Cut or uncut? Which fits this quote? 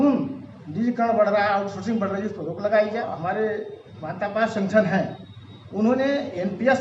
cut